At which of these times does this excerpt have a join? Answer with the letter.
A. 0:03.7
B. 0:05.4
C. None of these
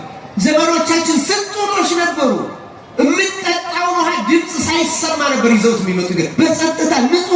C